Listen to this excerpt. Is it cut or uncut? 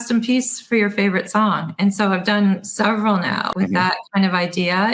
cut